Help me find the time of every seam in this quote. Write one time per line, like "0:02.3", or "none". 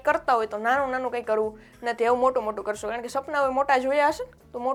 none